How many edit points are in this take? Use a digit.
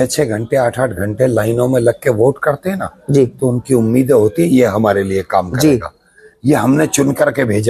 0